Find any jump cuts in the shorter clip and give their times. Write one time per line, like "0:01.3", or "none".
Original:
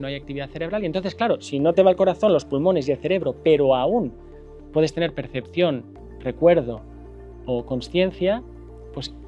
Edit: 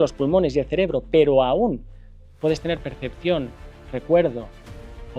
none